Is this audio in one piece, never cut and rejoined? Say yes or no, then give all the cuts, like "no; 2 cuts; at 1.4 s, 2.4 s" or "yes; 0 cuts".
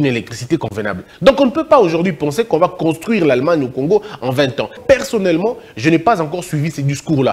no; 2 cuts; at 1.1 s, 4.8 s